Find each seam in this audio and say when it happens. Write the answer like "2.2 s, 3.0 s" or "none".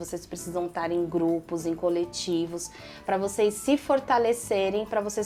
none